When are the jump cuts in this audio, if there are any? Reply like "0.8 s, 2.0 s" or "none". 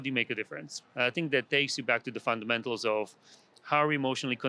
none